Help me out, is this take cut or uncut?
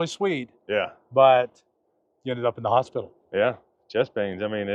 uncut